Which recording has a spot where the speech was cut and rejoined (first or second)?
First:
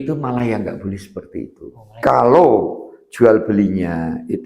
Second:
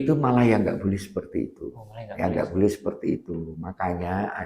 first